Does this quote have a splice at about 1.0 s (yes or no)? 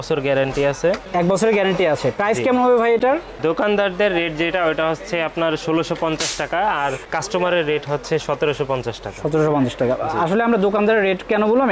no